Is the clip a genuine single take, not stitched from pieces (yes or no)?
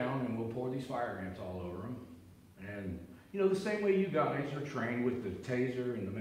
yes